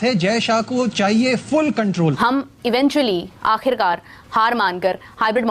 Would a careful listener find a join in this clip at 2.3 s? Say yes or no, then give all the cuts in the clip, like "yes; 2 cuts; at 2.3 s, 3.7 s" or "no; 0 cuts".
yes; 1 cut; at 2.3 s